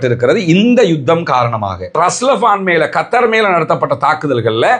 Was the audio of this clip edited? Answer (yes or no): yes